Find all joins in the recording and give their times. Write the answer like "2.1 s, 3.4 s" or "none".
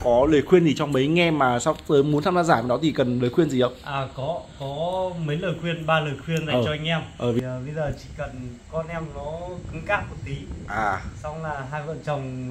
7.4 s